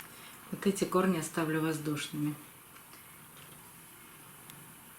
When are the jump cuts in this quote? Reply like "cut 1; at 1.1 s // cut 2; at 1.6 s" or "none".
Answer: cut 1; at 3.6 s